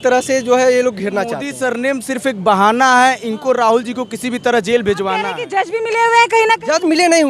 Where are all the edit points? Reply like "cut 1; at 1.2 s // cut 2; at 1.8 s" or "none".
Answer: cut 1; at 1.5 s // cut 2; at 5.4 s